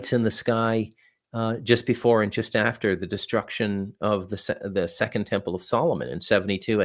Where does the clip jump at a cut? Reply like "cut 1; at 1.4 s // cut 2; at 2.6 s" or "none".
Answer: none

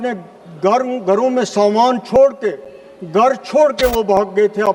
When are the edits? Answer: none

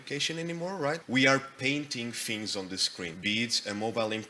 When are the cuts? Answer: cut 1; at 1.0 s // cut 2; at 3.1 s

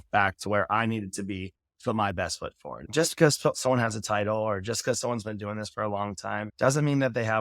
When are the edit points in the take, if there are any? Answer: cut 1; at 2.8 s // cut 2; at 6.5 s

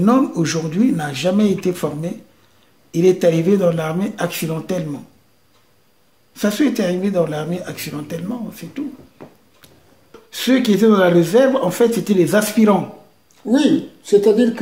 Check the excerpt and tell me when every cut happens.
cut 1; at 10.1 s

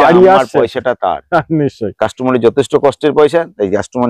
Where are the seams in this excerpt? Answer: none

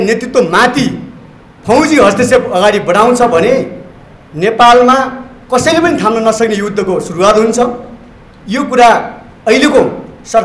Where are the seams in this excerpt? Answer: none

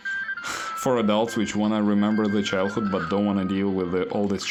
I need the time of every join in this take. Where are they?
none

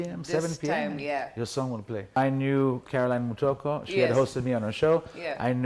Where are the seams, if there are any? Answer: cut 1; at 2.2 s

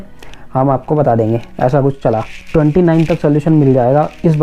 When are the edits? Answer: cut 1; at 2.3 s

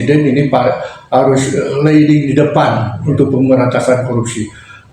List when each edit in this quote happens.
none

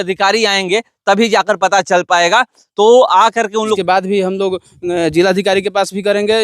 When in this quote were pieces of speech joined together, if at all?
cut 1; at 3.8 s

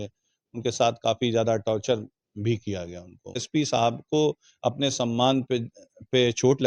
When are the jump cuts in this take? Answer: cut 1; at 3.4 s

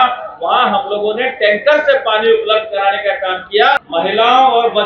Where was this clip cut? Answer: cut 1; at 3.8 s

